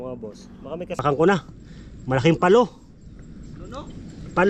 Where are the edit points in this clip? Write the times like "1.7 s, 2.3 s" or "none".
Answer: 1.0 s